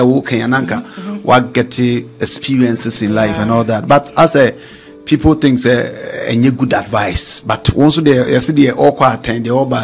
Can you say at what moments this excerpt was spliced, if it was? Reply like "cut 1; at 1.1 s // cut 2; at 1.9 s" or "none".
none